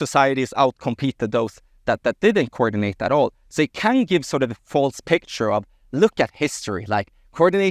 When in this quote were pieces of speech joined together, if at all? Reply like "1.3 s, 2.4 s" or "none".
none